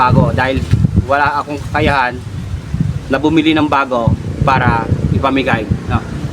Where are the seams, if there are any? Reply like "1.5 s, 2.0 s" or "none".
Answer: none